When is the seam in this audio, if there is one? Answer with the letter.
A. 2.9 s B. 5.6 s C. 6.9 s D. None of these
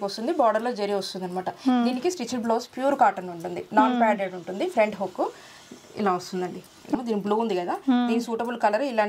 C